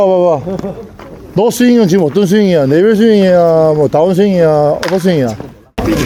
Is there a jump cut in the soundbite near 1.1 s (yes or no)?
no